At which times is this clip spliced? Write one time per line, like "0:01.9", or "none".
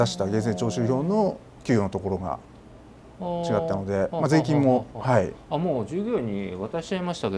none